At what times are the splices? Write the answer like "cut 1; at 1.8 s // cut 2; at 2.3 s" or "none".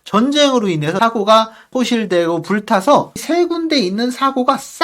cut 1; at 1.0 s // cut 2; at 1.7 s // cut 3; at 3.2 s